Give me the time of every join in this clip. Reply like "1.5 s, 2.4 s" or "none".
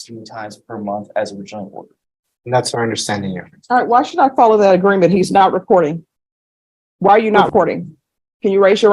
7.5 s